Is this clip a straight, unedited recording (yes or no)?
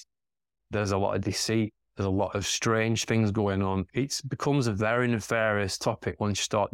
no